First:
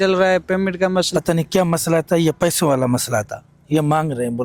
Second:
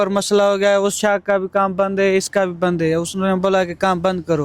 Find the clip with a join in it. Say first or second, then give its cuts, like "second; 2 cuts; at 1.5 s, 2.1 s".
first; 1 cut; at 1.1 s